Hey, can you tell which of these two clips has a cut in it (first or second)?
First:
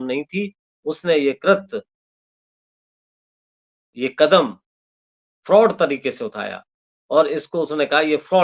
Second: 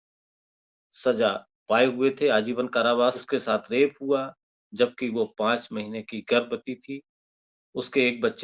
second